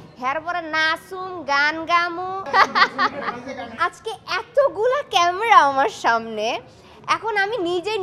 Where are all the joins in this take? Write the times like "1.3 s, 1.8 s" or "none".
2.4 s, 3.7 s